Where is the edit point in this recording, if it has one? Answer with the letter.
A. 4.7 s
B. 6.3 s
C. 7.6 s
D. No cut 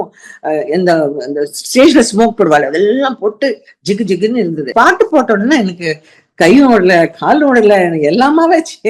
A